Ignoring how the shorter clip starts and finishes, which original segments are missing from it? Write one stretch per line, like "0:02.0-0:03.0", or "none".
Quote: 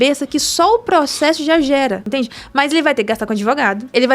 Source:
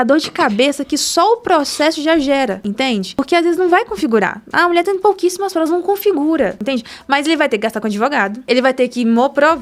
0:02.6-0:06.6